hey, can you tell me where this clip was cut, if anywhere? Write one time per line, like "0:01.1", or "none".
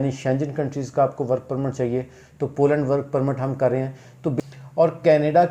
0:04.3

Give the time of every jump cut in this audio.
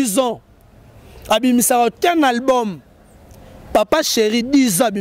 none

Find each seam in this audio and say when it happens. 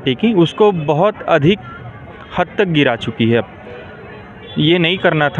none

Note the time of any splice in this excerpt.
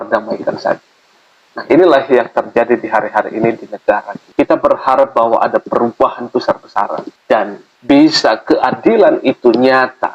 none

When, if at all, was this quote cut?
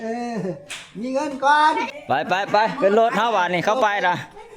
0:01.9

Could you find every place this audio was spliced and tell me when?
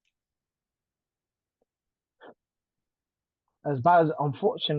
none

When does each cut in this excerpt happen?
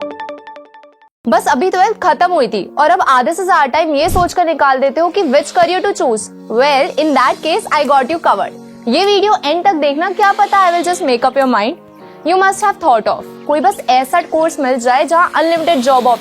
0:01.0

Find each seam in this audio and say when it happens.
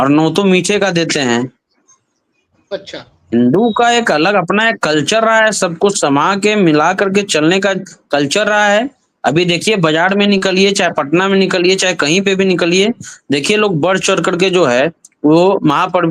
none

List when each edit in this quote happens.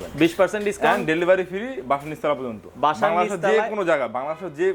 none

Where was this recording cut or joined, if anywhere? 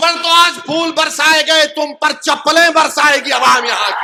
none

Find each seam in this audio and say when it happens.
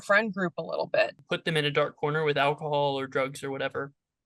0:01.2

